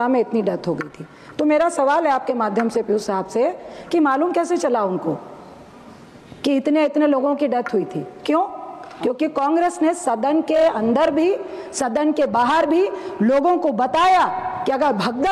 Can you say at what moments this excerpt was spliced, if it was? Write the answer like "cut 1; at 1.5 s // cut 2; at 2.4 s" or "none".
none